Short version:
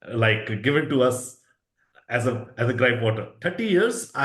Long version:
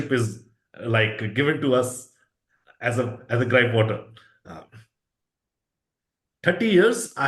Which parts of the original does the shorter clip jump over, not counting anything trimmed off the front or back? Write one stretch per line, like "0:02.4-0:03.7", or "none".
0:04.0-0:06.3